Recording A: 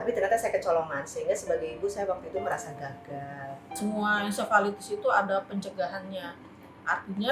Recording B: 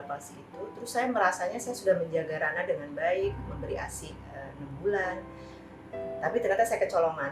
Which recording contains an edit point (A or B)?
A